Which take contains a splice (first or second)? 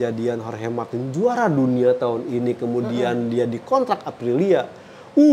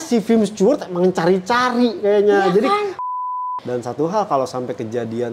second